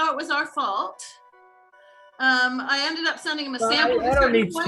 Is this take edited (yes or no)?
no